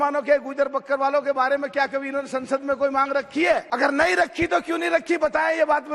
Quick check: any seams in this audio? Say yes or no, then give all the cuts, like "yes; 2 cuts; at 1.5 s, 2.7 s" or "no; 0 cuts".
yes; 1 cut; at 3.7 s